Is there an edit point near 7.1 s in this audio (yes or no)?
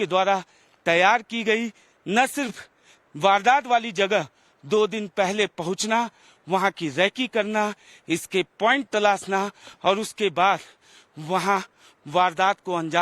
yes